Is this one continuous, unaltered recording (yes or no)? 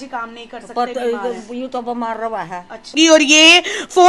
no